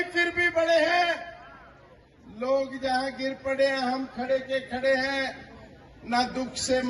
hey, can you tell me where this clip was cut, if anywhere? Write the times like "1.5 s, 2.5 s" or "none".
none